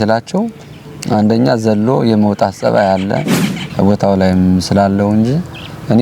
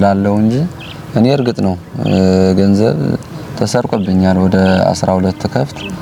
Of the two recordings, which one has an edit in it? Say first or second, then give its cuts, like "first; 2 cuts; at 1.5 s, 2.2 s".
first; 1 cut; at 3.6 s